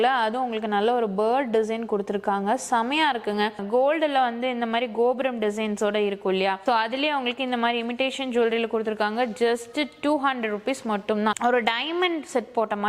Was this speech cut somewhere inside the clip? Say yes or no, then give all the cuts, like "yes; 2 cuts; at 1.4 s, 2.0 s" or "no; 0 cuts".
yes; 3 cuts; at 3.5 s, 6.6 s, 11.4 s